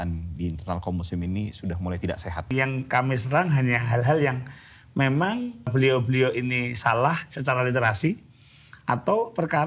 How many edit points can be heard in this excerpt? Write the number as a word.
two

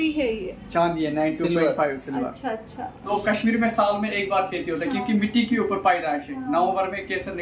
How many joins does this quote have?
one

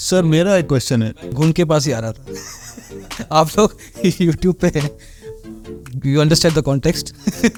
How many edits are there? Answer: zero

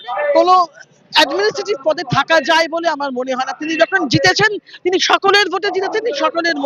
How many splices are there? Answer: zero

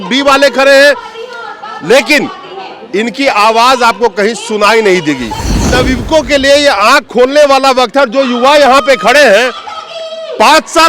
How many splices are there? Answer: one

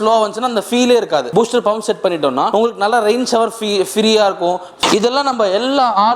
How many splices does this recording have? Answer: three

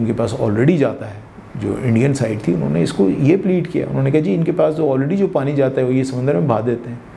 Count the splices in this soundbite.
zero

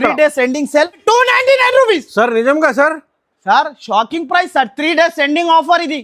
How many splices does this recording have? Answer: one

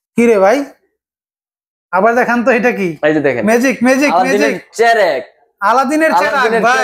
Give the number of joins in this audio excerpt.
zero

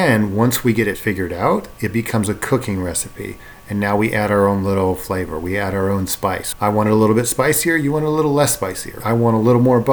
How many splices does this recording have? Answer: two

